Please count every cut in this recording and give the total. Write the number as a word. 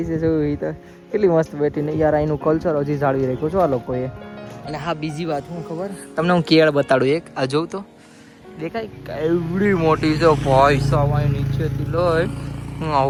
zero